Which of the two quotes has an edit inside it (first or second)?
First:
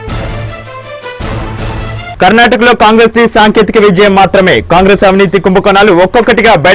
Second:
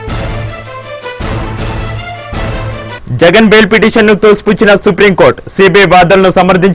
second